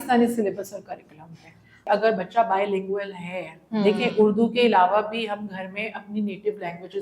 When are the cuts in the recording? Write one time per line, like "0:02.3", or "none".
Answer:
0:01.8